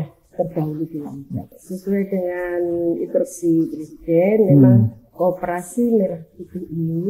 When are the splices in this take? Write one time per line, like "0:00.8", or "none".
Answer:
0:01.6